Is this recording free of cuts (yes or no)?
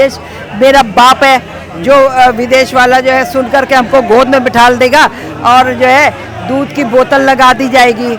yes